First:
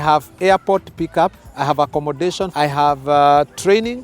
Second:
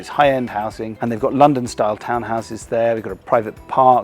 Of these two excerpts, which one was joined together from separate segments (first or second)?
first